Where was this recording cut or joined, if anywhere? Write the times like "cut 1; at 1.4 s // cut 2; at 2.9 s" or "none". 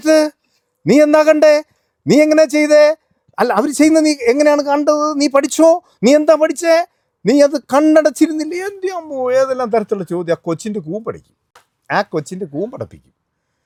none